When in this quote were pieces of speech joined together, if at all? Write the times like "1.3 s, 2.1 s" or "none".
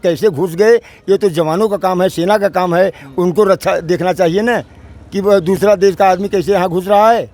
none